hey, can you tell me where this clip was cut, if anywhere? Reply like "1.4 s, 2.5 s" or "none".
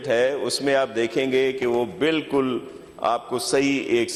none